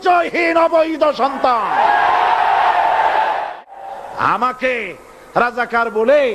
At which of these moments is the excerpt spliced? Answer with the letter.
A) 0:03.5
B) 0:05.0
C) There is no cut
A